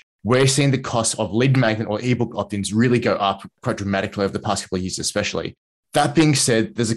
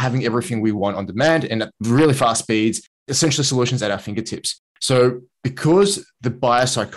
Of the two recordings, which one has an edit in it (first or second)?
second